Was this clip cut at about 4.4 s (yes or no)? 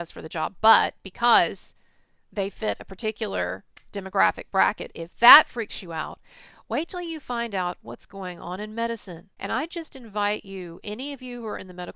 no